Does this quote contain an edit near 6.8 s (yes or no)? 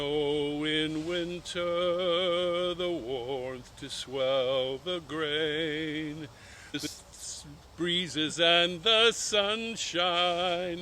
yes